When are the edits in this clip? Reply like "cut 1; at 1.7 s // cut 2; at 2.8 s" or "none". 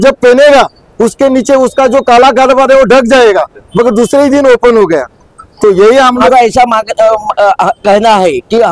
cut 1; at 6.3 s